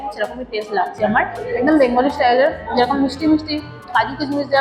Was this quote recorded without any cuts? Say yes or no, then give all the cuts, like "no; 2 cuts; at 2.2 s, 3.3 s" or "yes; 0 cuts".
no; 1 cut; at 1.4 s